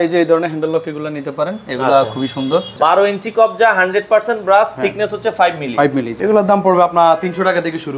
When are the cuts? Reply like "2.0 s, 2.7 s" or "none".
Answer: 2.7 s, 6.1 s